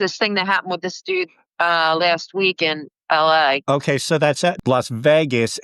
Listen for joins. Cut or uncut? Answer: cut